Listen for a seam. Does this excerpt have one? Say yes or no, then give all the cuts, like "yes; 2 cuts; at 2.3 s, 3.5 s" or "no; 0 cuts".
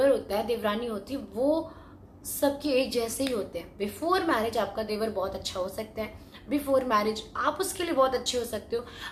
no; 0 cuts